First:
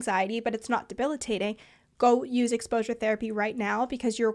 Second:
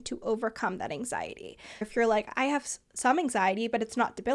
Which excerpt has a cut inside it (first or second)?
second